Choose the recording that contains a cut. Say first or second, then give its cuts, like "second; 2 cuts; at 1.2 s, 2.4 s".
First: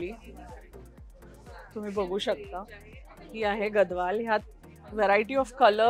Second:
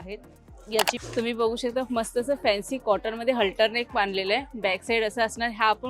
second; 1 cut; at 0.9 s